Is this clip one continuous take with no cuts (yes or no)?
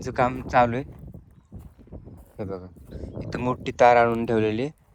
yes